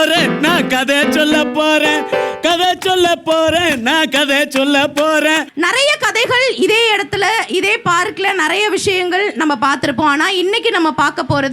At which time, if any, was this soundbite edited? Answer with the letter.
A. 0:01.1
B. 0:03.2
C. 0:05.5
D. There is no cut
C